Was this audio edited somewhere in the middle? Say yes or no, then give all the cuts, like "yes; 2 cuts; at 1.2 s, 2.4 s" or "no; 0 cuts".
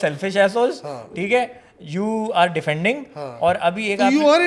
no; 0 cuts